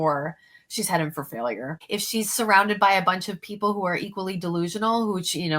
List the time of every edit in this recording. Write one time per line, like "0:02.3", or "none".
0:01.7